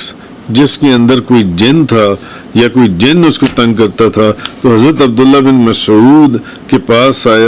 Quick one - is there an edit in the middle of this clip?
no; 0 cuts

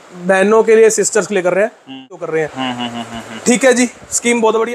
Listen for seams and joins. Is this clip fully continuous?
no; 1 cut; at 2.3 s

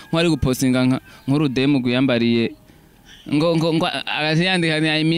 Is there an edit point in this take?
no; 0 cuts

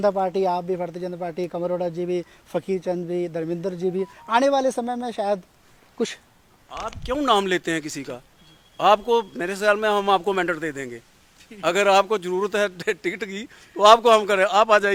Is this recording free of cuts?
yes; 0 cuts

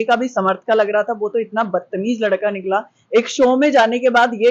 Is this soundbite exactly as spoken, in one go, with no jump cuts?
yes; 0 cuts

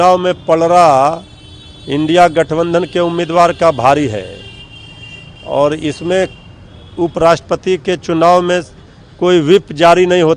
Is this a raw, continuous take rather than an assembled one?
yes; 0 cuts

